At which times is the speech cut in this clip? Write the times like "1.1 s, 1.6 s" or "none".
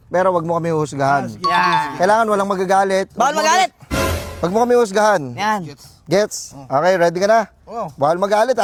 none